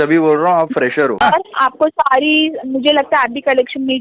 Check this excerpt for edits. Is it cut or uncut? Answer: cut